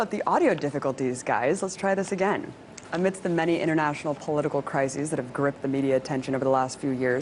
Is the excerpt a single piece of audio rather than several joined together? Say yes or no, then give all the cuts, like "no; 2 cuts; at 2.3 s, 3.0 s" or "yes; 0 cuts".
yes; 0 cuts